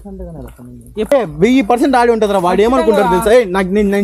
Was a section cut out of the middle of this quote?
yes; 1 cut; at 1.1 s

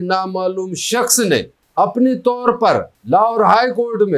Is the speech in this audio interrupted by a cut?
yes; 2 cuts; at 1.6 s, 2.9 s

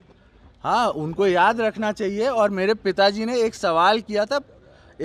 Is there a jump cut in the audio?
no; 0 cuts

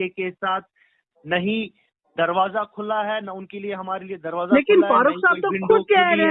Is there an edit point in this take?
no; 0 cuts

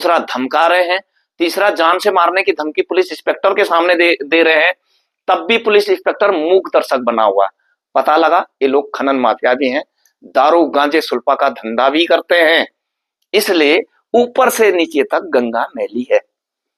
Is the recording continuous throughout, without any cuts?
yes; 0 cuts

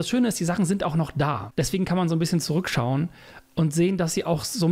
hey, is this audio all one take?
yes; 0 cuts

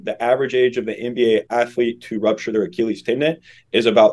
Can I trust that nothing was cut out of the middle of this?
no; 1 cut; at 1.5 s

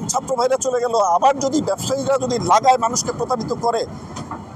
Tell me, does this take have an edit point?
no; 0 cuts

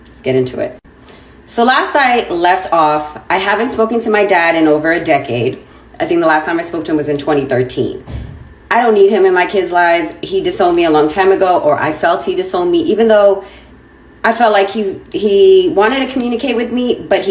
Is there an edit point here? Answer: no; 0 cuts

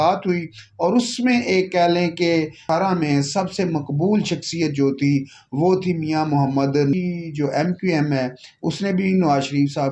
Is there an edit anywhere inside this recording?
yes; 2 cuts; at 2.6 s, 6.9 s

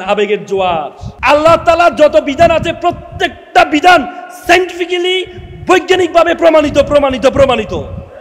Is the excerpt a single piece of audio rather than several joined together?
no; 1 cut; at 1.0 s

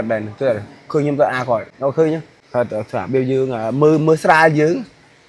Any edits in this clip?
yes; 2 cuts; at 1.7 s, 2.3 s

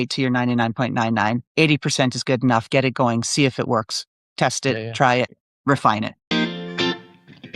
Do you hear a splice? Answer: yes; 1 cut; at 6.2 s

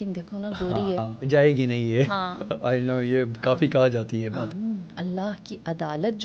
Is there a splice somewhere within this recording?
yes; 2 cuts; at 1.0 s, 4.5 s

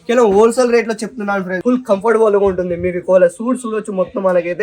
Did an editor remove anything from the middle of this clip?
yes; 1 cut; at 1.5 s

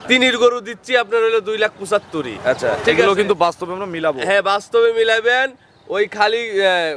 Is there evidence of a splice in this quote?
no; 0 cuts

